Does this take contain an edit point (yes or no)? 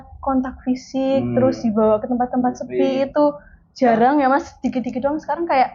no